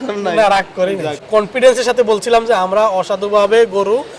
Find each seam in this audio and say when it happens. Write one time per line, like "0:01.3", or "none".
0:01.2